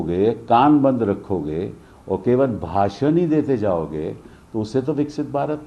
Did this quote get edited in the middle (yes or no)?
no